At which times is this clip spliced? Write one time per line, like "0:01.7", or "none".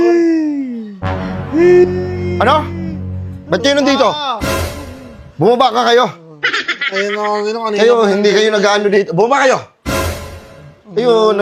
none